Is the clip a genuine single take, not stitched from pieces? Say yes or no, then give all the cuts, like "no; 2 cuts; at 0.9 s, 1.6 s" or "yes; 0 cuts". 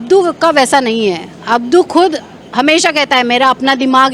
yes; 0 cuts